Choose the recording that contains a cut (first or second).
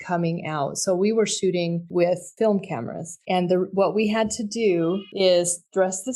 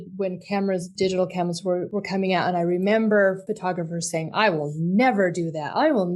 second